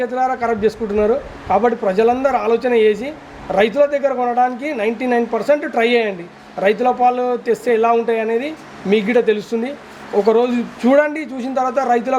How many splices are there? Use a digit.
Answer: 0